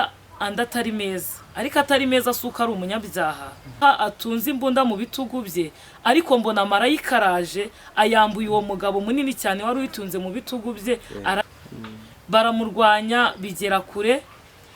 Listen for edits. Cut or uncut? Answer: cut